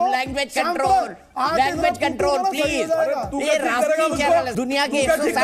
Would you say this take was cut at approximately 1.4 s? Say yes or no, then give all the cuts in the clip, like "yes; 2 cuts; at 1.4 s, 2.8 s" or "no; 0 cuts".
no; 0 cuts